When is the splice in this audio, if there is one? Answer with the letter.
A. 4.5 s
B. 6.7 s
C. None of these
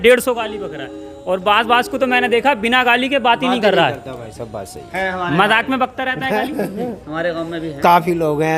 C